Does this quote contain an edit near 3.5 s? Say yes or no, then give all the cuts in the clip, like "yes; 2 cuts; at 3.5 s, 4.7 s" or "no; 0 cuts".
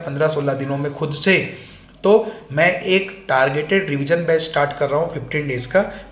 no; 0 cuts